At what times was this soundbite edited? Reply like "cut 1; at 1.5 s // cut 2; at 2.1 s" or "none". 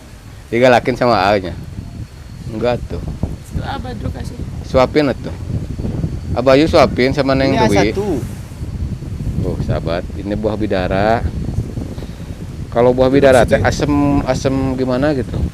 none